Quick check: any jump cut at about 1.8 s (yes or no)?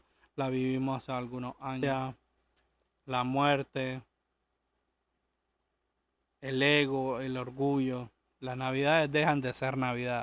yes